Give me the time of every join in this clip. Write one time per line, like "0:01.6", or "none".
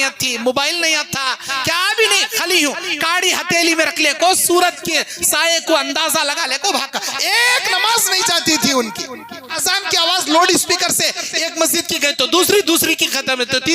0:09.5